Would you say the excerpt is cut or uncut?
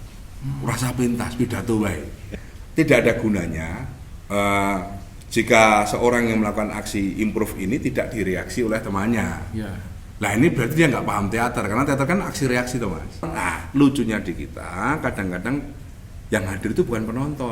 cut